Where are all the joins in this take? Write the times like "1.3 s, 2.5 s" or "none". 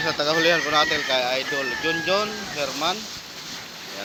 none